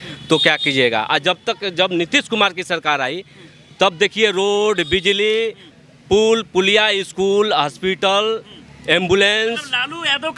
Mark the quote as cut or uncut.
uncut